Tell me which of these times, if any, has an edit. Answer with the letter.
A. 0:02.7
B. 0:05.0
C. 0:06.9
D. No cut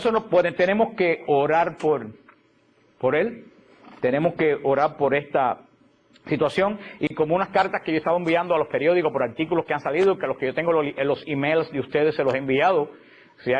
D